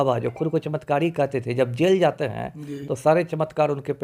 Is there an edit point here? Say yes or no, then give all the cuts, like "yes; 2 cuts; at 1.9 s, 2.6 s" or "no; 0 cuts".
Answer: no; 0 cuts